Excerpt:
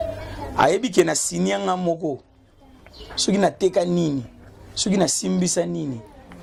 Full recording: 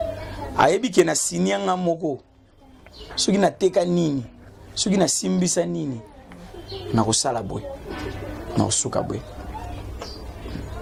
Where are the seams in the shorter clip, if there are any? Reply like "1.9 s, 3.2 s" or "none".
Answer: none